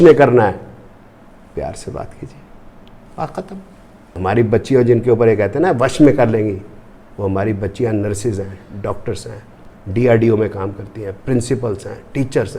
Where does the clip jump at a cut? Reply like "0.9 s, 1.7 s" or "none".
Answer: 4.2 s